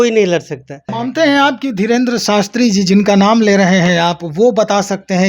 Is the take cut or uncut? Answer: cut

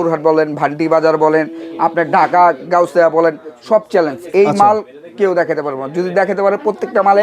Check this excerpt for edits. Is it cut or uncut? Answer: uncut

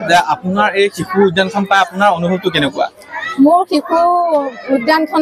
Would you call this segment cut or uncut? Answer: uncut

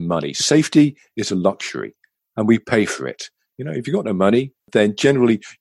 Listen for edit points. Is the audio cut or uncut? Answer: cut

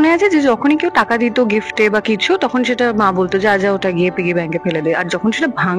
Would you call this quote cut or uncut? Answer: uncut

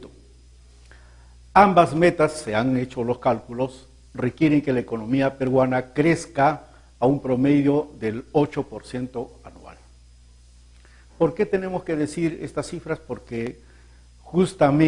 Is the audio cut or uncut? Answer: cut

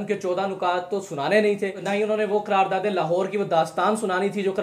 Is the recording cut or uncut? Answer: uncut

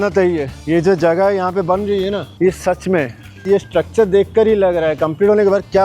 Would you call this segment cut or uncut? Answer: uncut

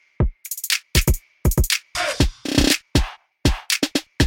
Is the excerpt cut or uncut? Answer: cut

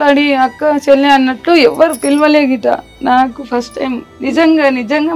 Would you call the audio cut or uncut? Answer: uncut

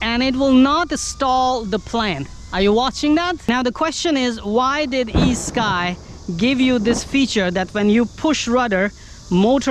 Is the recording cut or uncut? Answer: cut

